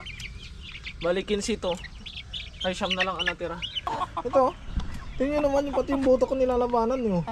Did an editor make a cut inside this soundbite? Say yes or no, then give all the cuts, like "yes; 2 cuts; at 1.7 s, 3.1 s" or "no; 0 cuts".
yes; 1 cut; at 3.8 s